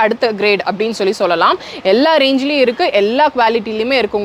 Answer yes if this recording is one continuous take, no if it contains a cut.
yes